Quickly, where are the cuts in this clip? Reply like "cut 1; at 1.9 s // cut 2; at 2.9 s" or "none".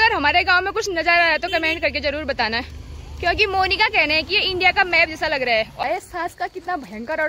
cut 1; at 5.8 s